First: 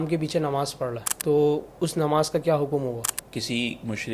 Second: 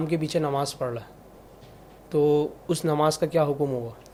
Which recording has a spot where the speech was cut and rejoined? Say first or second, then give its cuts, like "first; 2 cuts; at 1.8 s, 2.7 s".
first; 2 cuts; at 1.1 s, 3.2 s